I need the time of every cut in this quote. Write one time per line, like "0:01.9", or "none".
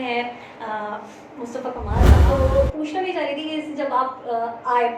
0:02.2